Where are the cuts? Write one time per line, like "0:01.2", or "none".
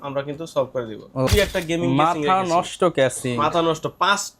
0:01.3